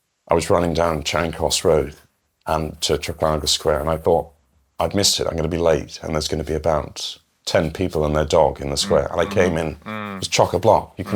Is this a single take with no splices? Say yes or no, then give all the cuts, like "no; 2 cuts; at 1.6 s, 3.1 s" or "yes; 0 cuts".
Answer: yes; 0 cuts